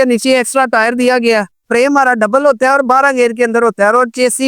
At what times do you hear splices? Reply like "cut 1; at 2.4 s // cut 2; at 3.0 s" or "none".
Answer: cut 1; at 1.6 s